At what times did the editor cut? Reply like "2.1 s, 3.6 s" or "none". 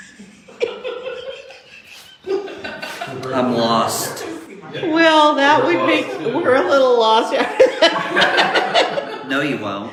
none